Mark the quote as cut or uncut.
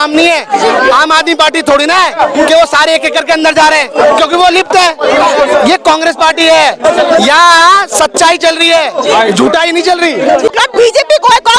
uncut